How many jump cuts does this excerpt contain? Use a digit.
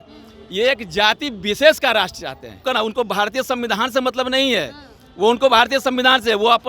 1